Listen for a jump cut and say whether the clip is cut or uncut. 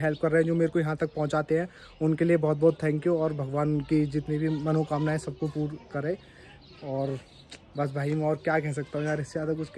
uncut